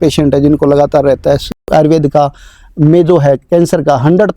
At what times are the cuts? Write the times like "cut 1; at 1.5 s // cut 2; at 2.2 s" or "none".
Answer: cut 1; at 1.7 s